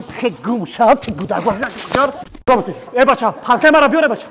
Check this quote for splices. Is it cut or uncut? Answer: cut